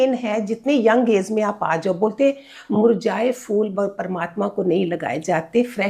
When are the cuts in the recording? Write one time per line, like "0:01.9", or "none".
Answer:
none